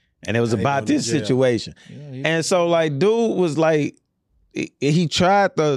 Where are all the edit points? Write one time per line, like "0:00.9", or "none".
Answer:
none